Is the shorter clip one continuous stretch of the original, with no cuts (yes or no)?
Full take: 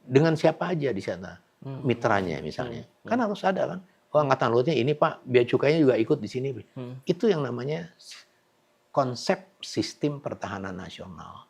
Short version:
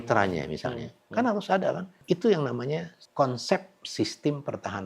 no